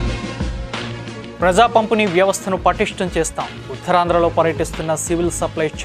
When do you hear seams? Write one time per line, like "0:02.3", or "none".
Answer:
0:01.3